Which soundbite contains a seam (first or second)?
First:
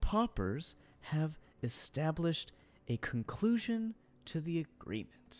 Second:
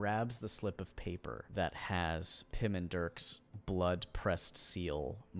second